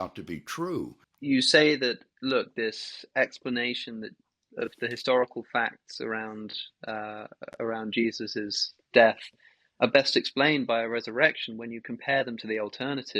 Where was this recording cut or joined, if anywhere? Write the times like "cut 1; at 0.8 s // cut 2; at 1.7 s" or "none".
cut 1; at 1.0 s